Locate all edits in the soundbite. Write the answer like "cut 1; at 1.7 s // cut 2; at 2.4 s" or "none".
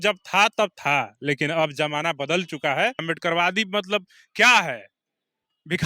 cut 1; at 3.0 s